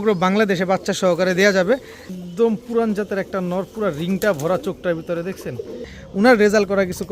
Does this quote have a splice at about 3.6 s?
no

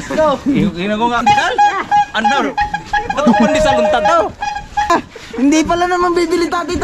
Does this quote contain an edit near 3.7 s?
no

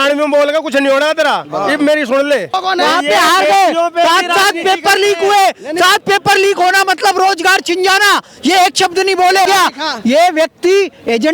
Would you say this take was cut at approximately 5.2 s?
no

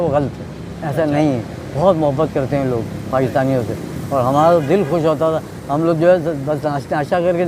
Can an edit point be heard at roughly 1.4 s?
no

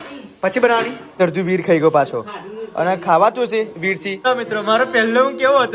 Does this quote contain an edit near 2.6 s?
no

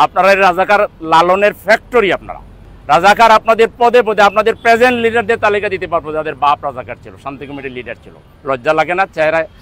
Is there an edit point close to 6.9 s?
no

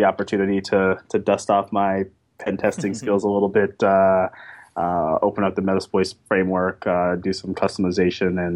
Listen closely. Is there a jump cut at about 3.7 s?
no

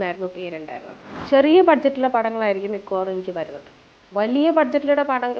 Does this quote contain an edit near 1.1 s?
yes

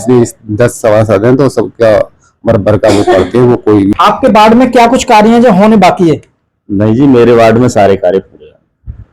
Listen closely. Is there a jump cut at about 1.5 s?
no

